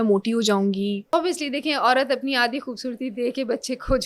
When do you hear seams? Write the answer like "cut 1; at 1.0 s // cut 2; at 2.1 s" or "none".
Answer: cut 1; at 1.1 s